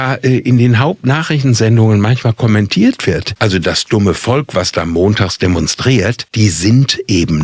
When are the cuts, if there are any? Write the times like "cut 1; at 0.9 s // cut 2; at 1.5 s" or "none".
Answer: cut 1; at 3.3 s